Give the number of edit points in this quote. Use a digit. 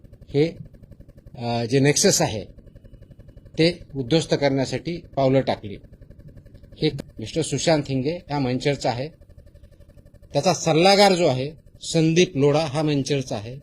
1